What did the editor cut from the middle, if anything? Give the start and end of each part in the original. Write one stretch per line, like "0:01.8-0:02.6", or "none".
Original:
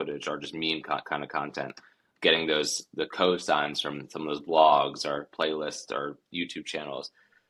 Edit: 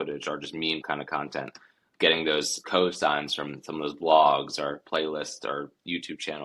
0:00.8-0:01.0
0:02.9-0:03.1

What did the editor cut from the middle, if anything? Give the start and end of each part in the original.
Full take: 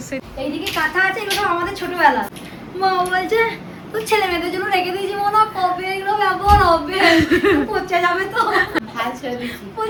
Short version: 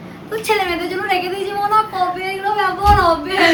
none

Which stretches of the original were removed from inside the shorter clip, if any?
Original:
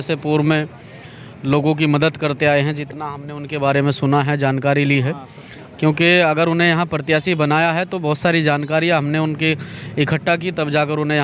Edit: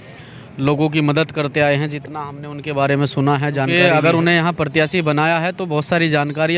0:04.6-0:06.0

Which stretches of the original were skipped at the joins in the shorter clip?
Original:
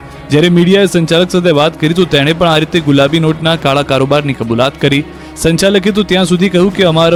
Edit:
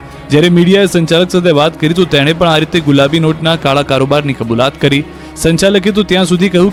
none

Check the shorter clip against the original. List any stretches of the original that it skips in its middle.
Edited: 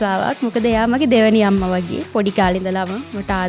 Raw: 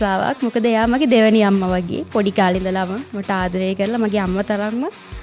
none

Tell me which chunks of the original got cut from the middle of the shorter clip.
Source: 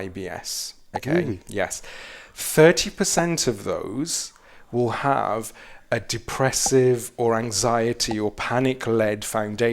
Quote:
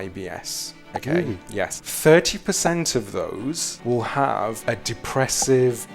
0:01.8-0:02.4
0:04.2-0:04.6
0:05.4-0:05.8

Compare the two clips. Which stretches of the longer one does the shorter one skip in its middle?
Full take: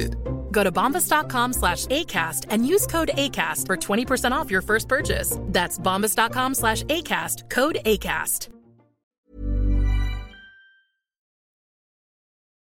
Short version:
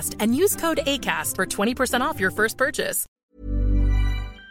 0:05.3-0:09.0

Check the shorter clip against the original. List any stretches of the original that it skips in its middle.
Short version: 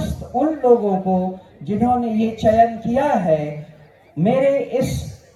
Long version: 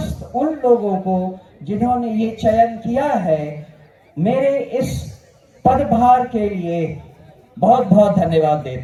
none

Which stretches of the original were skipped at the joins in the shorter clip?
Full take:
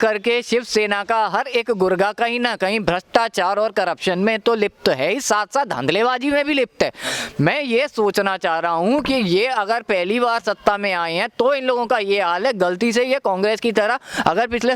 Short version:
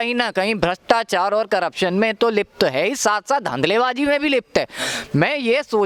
none

